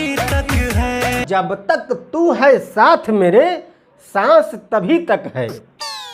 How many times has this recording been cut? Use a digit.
1